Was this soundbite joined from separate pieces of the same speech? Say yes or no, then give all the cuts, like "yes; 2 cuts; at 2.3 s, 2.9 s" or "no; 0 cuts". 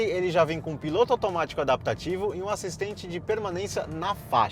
no; 0 cuts